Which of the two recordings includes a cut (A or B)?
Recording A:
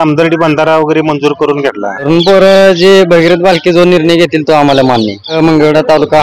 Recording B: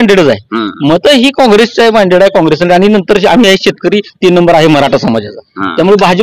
A